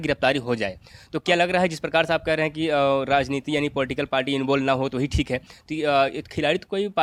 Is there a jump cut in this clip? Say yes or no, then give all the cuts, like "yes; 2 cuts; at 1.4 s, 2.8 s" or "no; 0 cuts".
no; 0 cuts